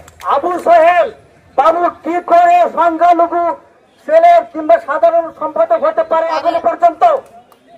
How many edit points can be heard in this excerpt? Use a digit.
0